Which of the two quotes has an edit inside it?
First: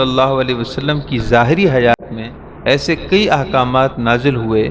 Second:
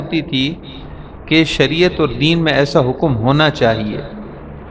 first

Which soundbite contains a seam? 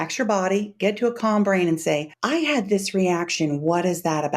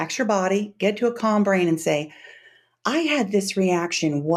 first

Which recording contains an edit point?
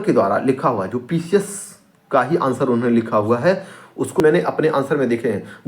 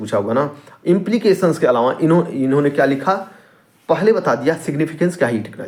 first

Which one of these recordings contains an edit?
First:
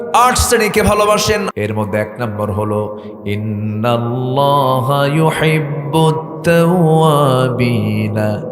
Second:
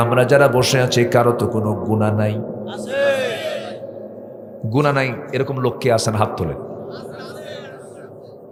first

